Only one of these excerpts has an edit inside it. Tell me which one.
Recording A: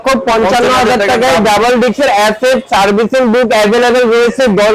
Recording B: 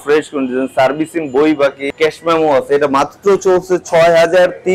B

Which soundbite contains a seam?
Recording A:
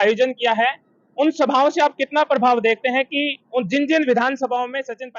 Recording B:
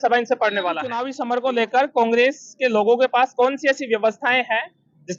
B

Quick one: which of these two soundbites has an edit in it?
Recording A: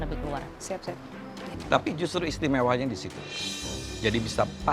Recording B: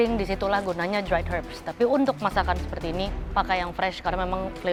A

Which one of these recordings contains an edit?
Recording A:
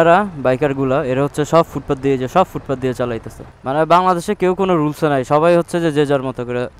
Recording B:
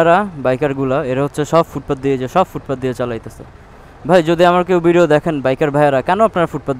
A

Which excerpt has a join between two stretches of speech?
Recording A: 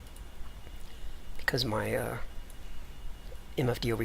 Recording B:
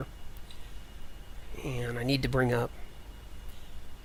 A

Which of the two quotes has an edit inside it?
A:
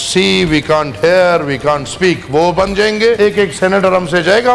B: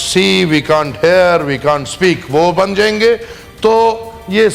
A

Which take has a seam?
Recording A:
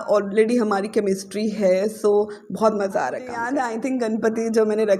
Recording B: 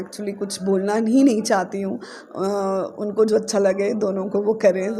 A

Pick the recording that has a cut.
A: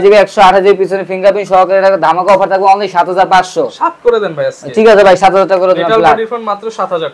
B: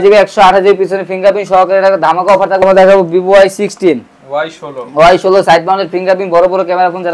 B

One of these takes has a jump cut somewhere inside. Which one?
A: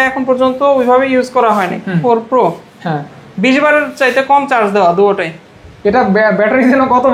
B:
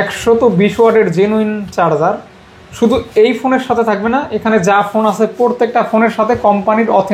A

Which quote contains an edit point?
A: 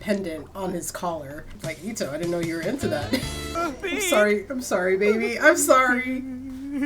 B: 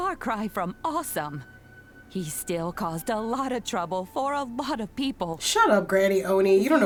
A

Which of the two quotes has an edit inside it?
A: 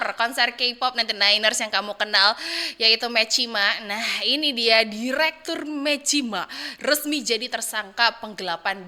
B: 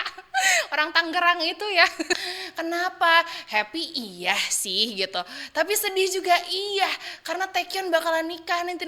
B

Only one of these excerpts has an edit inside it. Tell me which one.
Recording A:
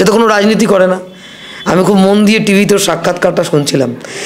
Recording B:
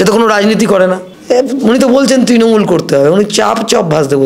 B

